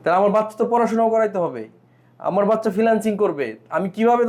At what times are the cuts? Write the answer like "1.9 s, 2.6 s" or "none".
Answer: none